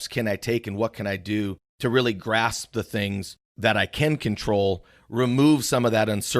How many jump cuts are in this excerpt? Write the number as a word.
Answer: one